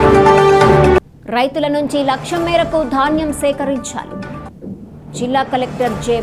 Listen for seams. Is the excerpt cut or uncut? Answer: cut